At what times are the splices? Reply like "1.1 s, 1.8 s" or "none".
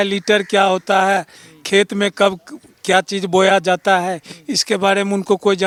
none